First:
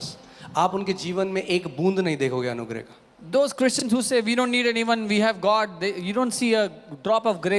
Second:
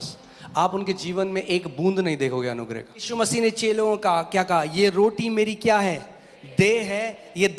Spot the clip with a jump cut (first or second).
second